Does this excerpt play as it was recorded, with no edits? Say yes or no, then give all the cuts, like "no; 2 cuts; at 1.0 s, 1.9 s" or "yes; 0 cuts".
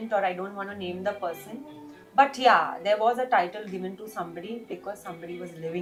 yes; 0 cuts